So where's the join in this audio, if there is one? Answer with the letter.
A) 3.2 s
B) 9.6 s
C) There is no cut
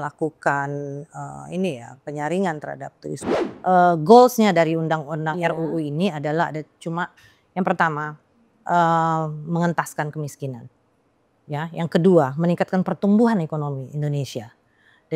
A